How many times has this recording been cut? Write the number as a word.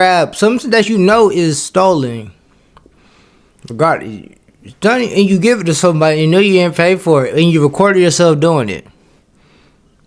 one